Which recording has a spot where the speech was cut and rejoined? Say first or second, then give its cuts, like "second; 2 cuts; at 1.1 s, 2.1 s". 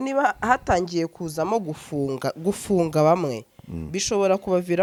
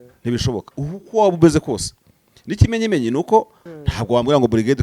second; 1 cut; at 3.6 s